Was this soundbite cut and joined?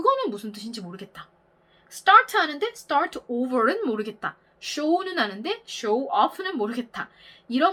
no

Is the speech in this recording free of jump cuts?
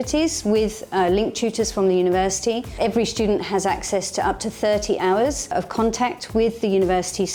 yes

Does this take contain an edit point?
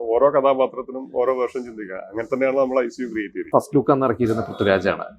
yes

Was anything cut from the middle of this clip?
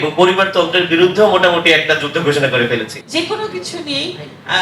yes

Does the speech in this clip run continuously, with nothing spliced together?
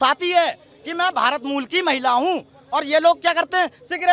yes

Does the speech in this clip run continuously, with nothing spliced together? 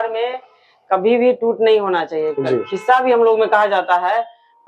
yes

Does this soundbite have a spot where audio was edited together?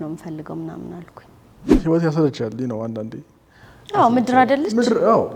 yes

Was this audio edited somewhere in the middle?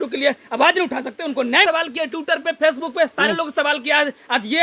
yes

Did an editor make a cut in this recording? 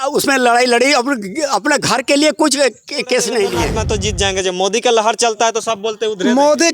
yes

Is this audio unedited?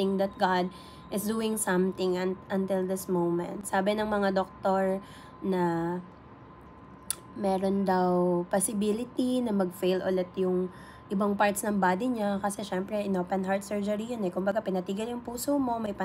yes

